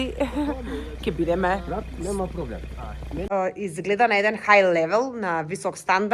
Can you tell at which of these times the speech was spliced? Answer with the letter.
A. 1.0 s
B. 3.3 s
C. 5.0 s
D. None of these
B